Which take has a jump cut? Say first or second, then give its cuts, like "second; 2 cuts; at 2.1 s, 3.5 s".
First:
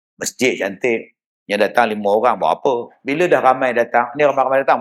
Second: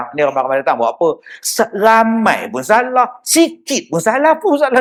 first; 1 cut; at 3.0 s